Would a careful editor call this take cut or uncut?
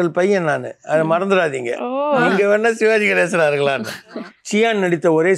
cut